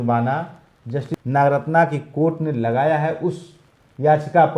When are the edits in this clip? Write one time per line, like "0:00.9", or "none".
0:01.1

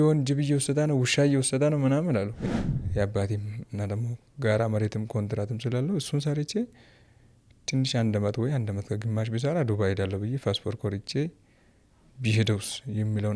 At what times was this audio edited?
0:02.4

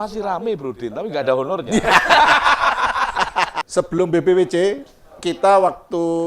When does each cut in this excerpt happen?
0:03.6

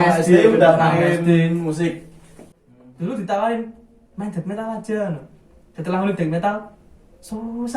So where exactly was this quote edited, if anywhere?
0:02.5

